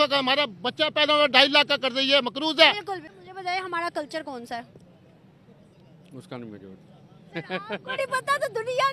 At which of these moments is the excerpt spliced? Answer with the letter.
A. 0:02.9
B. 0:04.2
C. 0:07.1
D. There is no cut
A